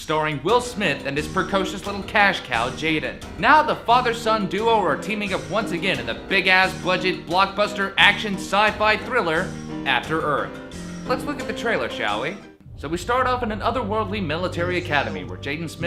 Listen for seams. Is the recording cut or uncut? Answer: uncut